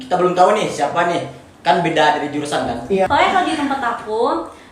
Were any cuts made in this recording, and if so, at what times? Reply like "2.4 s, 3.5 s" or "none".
3.1 s